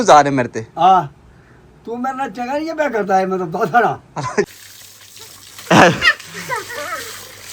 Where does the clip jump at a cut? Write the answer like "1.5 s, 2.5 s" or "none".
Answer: 4.5 s